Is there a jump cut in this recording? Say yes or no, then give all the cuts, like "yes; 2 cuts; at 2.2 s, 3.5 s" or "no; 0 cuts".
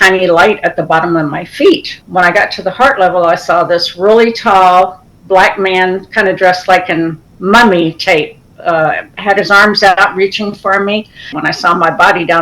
yes; 2 cuts; at 2.0 s, 11.3 s